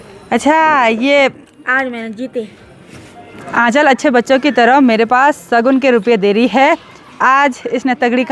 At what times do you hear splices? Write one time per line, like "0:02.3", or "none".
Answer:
none